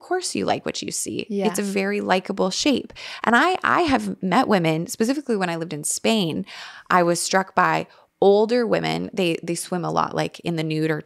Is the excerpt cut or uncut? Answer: uncut